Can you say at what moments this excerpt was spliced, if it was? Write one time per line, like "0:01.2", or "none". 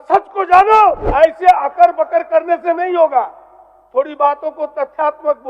0:01.0